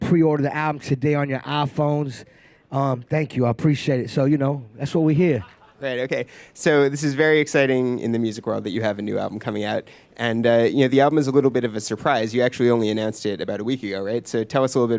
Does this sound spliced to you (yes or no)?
yes